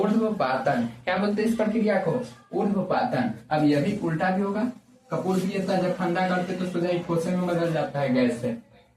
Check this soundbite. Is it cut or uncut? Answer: uncut